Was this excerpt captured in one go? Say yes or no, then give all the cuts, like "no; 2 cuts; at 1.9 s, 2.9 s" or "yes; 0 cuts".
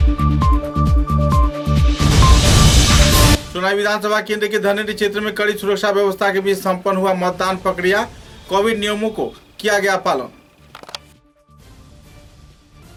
yes; 0 cuts